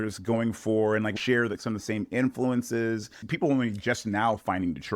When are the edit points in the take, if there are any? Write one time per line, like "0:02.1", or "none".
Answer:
0:01.1
0:03.1